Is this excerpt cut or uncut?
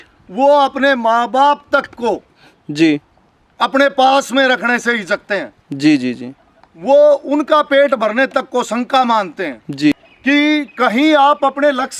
cut